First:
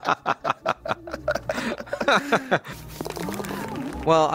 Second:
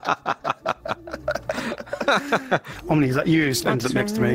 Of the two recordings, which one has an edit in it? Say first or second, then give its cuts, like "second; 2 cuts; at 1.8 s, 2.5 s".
second; 1 cut; at 2.7 s